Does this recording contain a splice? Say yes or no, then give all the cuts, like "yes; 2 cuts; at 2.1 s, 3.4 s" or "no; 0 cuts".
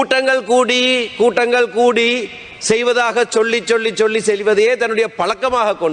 no; 0 cuts